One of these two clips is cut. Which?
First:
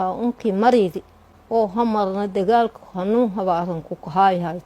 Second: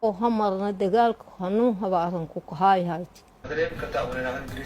second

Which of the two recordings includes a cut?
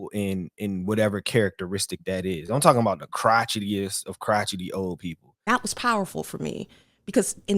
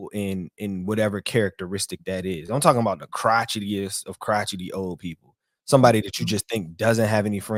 first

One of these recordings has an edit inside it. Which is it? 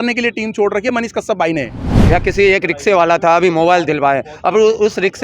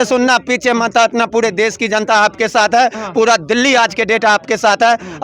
first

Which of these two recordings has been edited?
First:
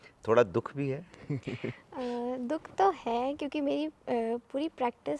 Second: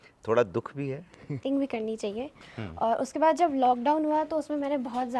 second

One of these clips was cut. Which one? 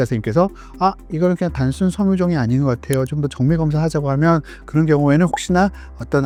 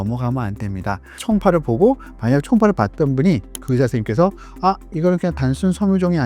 second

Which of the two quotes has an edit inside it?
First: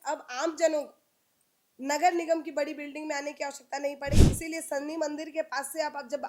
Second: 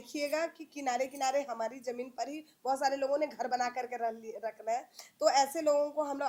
first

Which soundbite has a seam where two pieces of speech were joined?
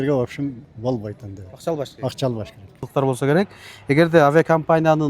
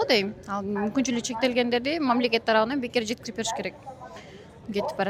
first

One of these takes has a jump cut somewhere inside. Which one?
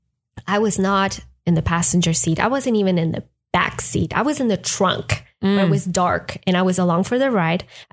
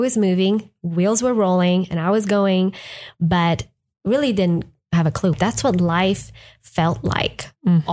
second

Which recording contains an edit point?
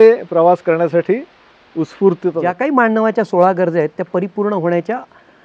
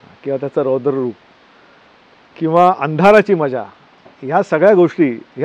first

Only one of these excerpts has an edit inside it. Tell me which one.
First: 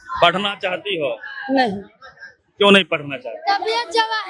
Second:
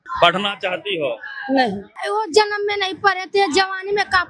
second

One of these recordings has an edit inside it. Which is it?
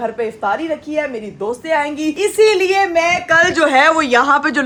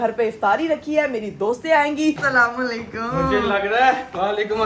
second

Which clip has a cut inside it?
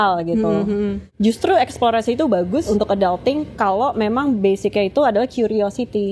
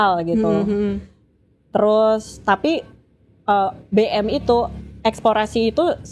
first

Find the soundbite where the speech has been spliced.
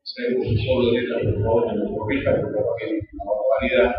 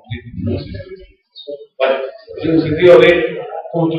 first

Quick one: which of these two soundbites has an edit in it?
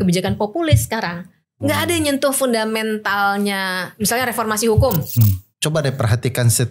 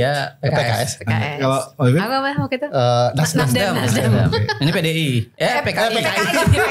first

